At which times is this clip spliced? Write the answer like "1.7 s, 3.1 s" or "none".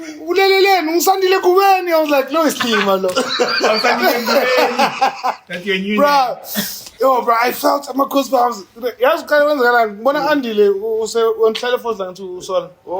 none